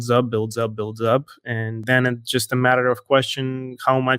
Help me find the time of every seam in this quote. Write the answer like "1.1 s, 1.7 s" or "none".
1.8 s

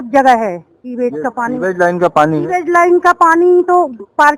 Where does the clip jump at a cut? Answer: none

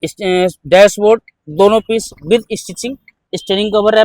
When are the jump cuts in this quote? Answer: 3.1 s

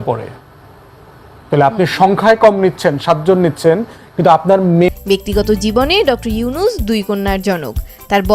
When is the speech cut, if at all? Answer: 4.9 s

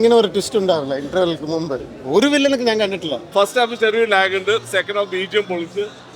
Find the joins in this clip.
3.2 s

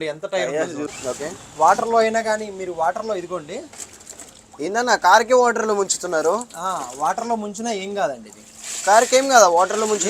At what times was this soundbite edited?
0.9 s

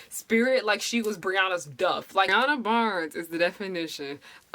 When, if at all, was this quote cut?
2.3 s

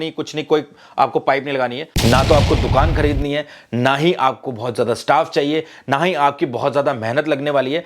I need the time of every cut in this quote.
1.9 s

